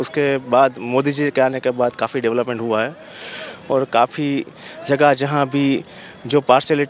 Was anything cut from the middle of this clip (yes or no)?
no